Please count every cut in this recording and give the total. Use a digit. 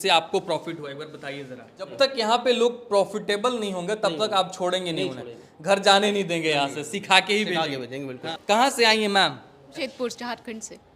3